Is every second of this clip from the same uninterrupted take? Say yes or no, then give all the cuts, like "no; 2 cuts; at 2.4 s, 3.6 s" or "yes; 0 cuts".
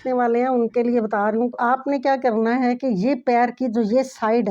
no; 1 cut; at 1.6 s